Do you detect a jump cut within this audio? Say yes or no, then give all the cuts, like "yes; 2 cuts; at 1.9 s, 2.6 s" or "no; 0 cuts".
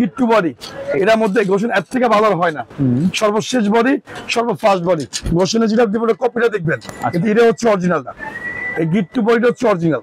no; 0 cuts